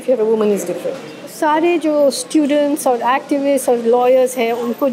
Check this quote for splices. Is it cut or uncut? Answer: cut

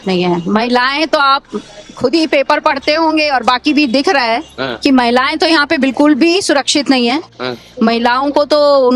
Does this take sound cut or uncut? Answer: uncut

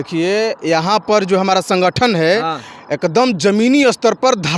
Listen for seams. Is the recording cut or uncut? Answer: uncut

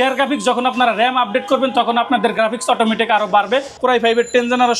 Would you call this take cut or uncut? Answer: cut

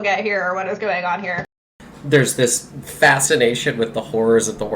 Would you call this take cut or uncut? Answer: cut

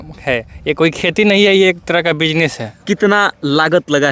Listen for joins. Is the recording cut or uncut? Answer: cut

